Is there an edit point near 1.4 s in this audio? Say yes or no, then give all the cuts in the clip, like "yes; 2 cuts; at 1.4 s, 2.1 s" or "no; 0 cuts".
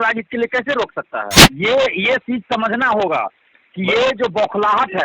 yes; 1 cut; at 1.4 s